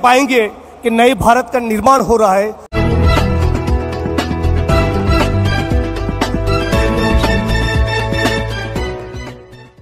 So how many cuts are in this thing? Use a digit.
1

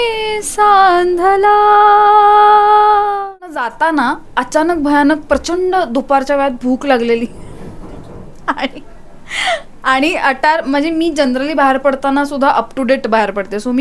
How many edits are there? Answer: 1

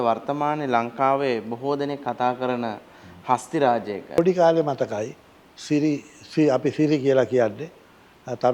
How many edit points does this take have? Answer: 1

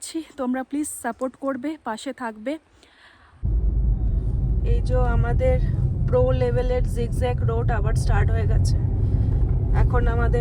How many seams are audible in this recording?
1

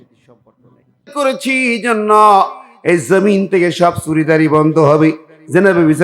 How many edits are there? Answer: 1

